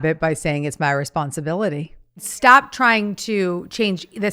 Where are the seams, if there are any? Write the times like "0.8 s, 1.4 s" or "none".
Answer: 2.3 s